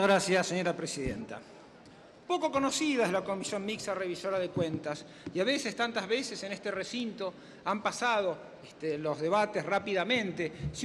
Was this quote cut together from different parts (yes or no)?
no